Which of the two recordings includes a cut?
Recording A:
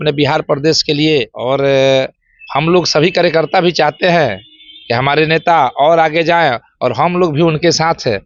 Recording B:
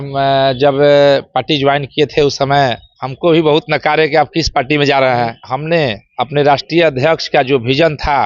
B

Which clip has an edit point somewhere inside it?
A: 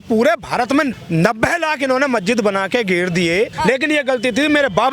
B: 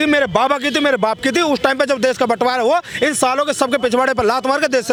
A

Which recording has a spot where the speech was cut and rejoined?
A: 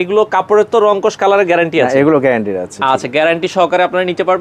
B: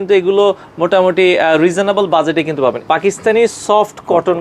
B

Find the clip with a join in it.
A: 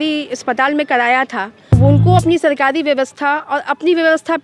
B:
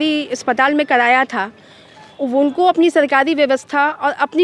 A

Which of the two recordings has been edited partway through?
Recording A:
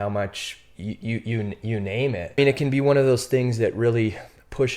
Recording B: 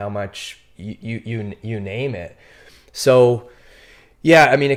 A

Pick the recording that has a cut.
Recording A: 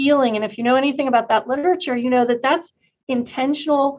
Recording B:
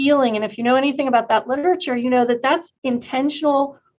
B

